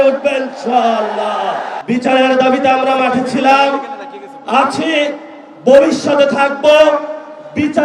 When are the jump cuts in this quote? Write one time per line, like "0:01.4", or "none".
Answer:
0:01.7